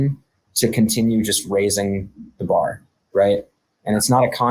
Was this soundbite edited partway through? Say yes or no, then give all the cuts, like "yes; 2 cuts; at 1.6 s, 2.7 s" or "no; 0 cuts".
no; 0 cuts